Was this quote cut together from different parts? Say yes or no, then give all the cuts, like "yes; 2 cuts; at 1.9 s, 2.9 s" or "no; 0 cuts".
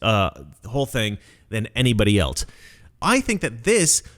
yes; 1 cut; at 3.0 s